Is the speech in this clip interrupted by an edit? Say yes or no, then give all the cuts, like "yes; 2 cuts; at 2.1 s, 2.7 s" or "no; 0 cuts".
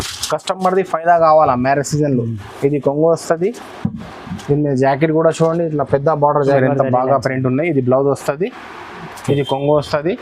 yes; 1 cut; at 6.6 s